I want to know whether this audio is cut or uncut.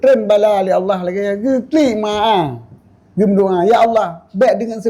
uncut